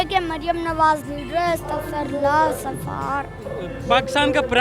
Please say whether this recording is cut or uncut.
uncut